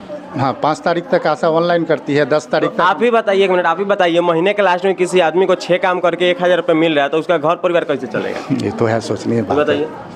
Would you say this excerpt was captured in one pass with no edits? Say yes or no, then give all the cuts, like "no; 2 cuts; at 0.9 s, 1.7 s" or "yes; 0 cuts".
yes; 0 cuts